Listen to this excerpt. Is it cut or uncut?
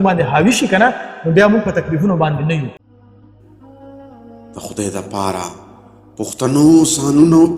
cut